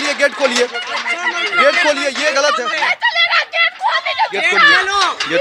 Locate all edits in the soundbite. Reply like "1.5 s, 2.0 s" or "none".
none